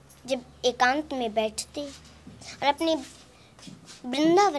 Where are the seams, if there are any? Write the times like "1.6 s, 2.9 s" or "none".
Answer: none